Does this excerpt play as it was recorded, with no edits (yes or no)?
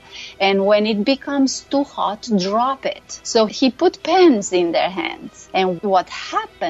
no